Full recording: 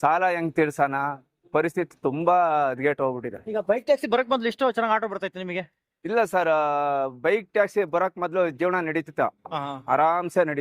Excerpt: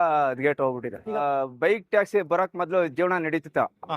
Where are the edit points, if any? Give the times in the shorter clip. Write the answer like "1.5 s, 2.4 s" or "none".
1.2 s